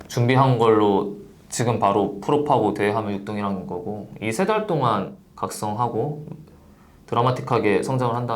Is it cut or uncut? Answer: cut